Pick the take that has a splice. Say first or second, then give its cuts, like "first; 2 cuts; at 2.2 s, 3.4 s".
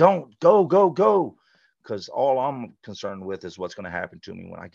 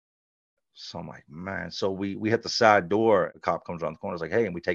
second; 1 cut; at 3.3 s